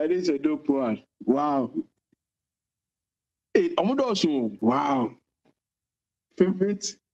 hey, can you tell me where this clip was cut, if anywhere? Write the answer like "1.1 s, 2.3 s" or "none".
4.5 s